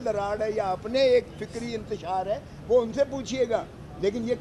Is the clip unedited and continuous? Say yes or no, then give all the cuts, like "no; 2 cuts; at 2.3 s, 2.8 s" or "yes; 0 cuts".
yes; 0 cuts